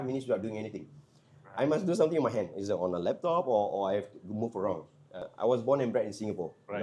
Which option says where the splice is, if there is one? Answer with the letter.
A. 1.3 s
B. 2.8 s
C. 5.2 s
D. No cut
C